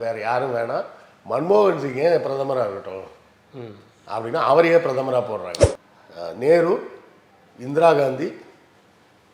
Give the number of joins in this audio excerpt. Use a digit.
1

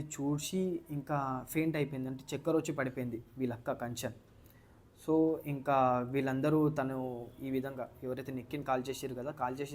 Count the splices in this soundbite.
0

